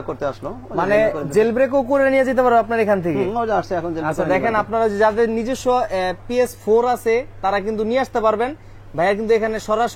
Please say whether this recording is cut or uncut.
uncut